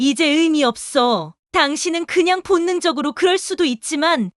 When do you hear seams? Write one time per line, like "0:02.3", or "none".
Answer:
0:01.4